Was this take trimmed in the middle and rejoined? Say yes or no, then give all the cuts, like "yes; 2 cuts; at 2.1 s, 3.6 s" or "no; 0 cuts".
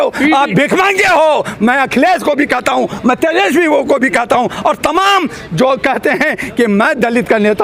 no; 0 cuts